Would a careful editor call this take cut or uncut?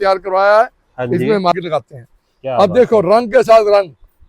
cut